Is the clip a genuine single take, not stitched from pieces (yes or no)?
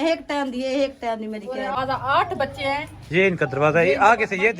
no